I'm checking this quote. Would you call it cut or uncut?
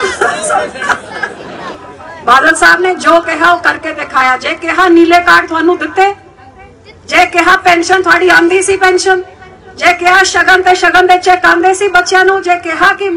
cut